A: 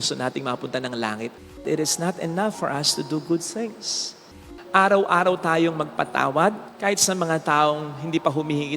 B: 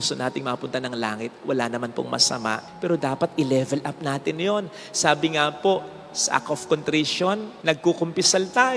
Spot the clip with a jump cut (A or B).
A